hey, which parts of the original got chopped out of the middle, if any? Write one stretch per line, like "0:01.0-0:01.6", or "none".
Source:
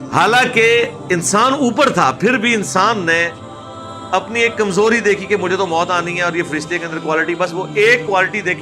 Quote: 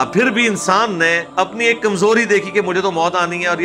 0:03.3-0:04.0